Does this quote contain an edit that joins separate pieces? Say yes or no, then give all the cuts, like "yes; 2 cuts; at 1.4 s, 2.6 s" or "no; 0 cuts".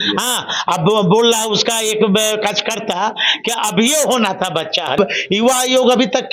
yes; 1 cut; at 5.0 s